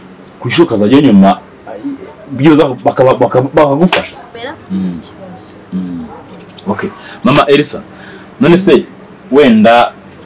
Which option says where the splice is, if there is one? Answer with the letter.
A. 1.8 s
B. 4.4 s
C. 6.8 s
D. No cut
B